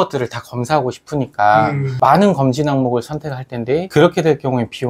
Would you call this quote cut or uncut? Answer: uncut